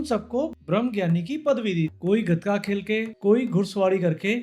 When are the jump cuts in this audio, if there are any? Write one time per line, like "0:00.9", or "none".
0:01.9